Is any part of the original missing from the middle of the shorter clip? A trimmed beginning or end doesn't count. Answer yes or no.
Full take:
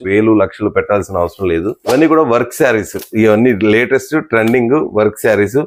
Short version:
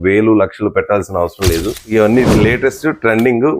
yes